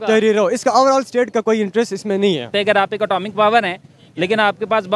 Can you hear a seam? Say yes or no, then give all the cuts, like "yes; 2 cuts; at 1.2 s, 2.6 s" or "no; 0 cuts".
yes; 1 cut; at 2.5 s